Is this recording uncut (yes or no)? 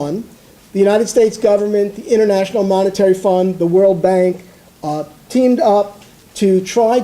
no